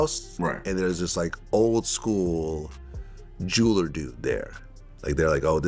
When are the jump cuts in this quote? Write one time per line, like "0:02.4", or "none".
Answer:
none